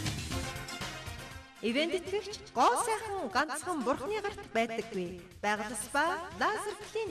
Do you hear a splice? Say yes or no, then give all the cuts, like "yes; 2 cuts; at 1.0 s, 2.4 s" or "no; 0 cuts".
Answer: yes; 1 cut; at 1.4 s